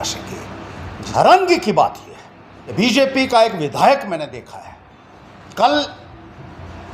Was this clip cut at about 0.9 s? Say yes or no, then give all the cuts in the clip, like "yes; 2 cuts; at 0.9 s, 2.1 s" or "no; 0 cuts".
yes; 2 cuts; at 0.9 s, 2.8 s